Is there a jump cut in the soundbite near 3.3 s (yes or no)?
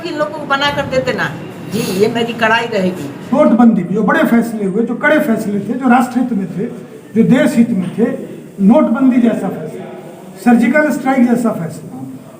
yes